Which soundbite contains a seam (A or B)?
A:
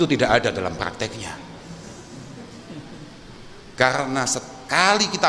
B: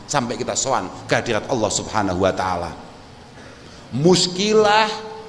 A